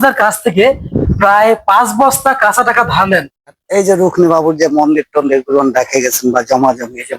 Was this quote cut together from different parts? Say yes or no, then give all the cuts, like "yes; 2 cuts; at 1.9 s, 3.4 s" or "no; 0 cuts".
yes; 1 cut; at 3.6 s